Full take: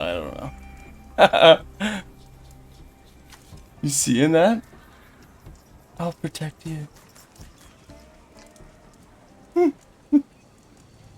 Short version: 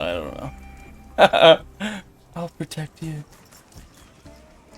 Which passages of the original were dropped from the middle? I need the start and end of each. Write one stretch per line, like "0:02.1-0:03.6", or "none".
0:02.2-0:05.8

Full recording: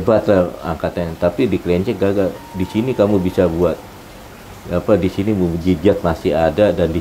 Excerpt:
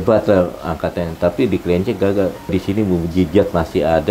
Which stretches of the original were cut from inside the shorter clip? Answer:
0:02.5-0:05.0

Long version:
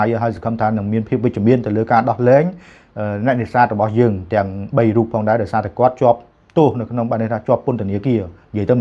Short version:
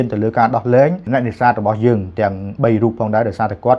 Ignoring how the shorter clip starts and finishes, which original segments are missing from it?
0:02.6-0:03.2

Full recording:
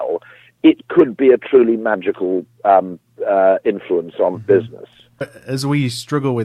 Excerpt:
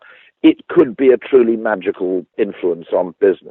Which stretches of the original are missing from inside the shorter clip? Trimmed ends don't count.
0:02.5-0:03.6

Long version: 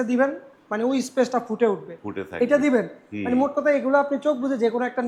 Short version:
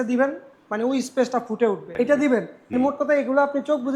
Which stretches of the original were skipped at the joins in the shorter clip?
0:01.9-0:02.3
0:03.0-0:03.1

